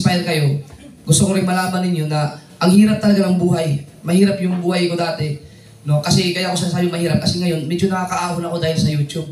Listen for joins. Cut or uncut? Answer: uncut